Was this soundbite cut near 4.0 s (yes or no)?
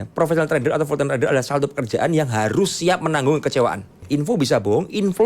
yes